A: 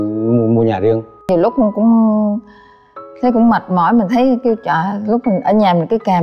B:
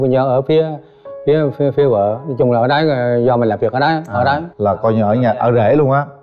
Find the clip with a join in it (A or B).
A